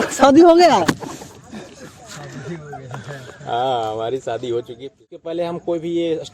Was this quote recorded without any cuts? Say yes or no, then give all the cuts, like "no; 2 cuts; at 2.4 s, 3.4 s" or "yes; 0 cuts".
no; 1 cut; at 5.1 s